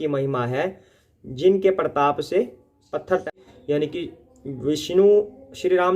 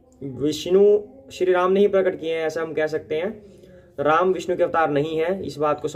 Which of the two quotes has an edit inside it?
first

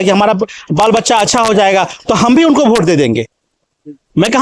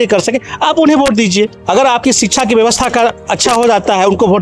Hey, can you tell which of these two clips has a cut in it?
second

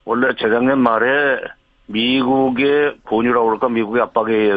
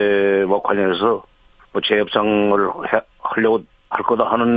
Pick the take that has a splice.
second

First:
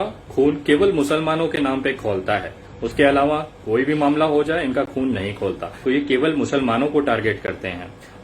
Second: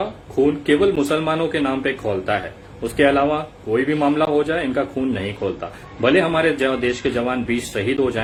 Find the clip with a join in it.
first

